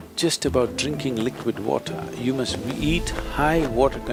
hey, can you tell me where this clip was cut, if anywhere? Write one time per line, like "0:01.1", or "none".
none

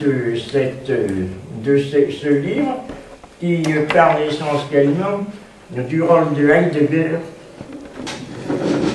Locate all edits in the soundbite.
0:02.0

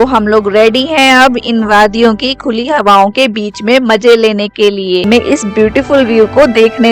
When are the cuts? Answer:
0:05.0

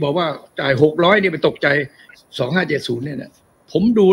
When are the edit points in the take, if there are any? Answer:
0:02.0

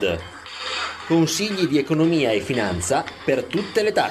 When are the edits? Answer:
none

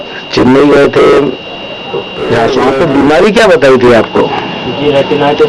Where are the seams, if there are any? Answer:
0:02.6

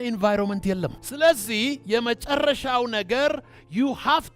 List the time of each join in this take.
0:01.0

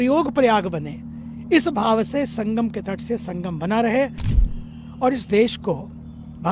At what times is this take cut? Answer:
0:04.3

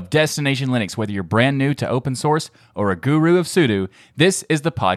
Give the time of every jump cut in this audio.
none

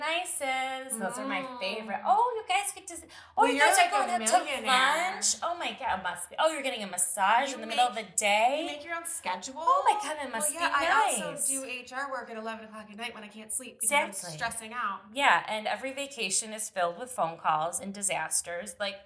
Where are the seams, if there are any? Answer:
none

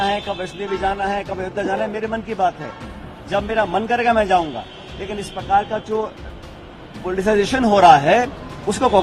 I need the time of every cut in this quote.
none

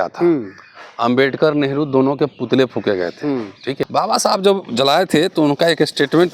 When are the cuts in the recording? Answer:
0:03.8

